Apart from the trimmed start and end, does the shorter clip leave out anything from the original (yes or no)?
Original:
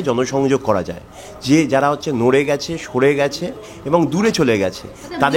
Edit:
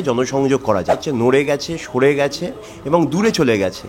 yes